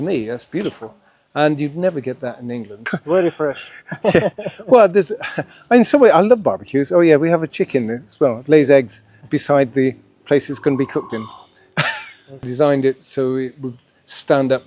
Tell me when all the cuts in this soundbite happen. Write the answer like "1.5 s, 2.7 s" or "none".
2.8 s, 12.5 s